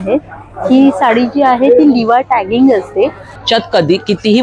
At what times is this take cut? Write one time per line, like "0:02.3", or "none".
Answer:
0:03.3

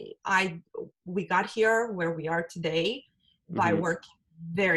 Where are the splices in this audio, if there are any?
none

